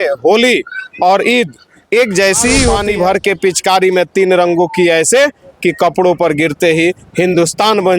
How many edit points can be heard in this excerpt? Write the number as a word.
one